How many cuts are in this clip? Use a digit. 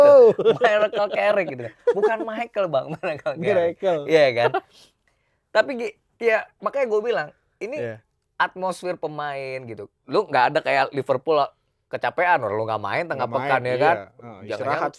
0